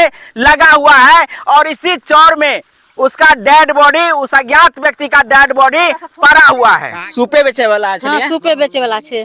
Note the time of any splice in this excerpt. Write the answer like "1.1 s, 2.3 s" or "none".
7.0 s